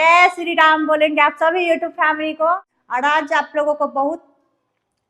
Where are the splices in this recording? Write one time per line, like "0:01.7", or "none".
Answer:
0:02.8